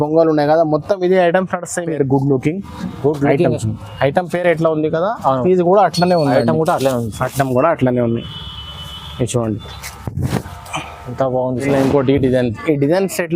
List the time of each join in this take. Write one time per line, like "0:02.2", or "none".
0:01.9
0:11.6